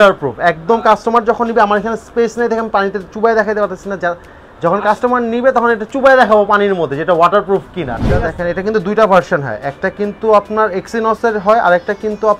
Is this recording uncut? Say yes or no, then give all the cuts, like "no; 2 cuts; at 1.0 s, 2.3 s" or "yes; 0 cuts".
no; 1 cut; at 8.3 s